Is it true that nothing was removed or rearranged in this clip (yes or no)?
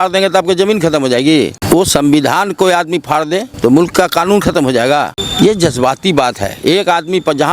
no